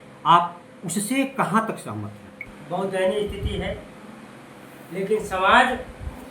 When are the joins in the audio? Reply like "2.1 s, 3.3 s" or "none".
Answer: 2.5 s

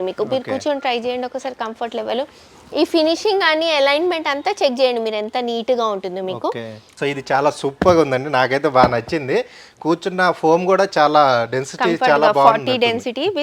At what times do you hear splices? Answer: 7.0 s

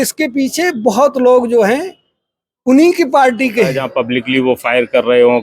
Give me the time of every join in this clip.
3.8 s

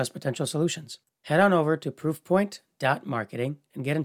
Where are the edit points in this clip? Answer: none

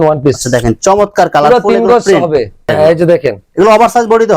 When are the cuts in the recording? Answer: 2.7 s

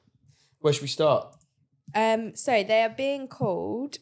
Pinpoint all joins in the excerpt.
none

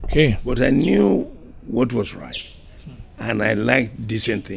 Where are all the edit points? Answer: none

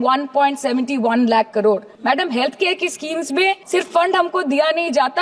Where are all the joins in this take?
1.9 s, 3.6 s

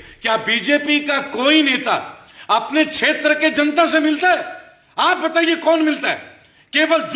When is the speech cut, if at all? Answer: none

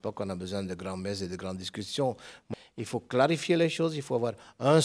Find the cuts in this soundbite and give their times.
2.4 s

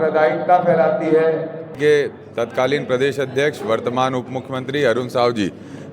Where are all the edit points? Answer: 1.7 s

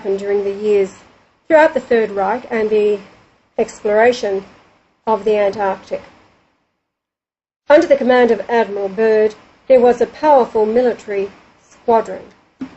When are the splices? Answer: 5.4 s

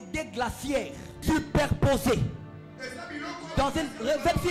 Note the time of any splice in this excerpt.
1.1 s

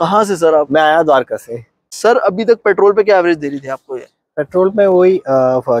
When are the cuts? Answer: 2.0 s

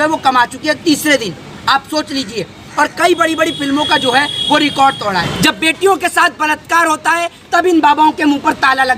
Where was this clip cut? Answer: 5.3 s

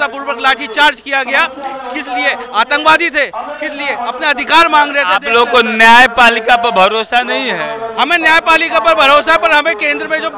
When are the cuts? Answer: none

